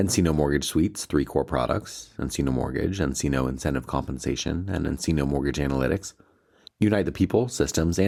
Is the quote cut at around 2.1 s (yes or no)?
no